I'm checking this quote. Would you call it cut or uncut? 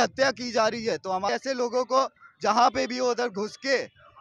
cut